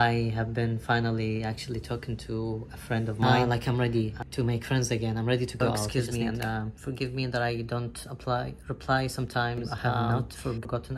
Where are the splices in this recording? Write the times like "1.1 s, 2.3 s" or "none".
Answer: 3.2 s, 5.9 s, 10.0 s

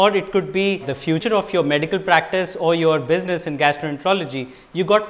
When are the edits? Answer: 1.2 s

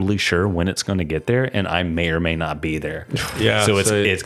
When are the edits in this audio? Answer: none

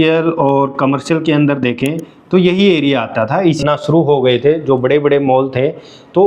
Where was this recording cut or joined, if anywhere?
3.6 s

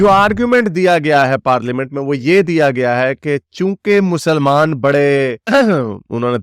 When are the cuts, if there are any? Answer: none

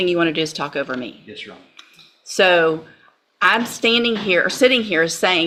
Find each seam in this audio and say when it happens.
none

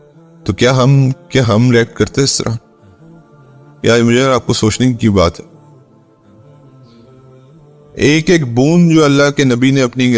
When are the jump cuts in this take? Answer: 5.4 s, 7.5 s

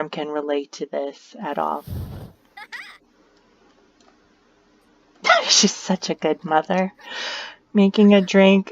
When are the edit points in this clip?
1.8 s

